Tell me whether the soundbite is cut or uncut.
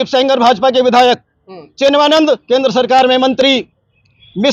uncut